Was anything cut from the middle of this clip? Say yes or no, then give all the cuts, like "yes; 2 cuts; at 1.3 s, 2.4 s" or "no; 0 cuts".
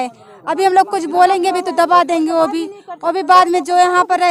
no; 0 cuts